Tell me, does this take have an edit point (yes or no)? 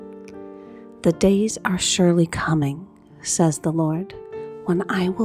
yes